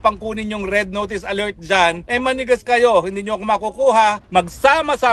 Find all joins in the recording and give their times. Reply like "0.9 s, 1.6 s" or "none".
2.0 s, 4.2 s